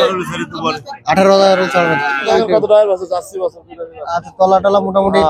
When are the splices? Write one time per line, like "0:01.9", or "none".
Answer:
0:02.3